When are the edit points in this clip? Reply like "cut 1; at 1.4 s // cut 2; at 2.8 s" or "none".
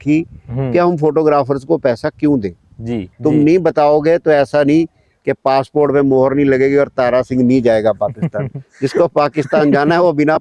cut 1; at 3.1 s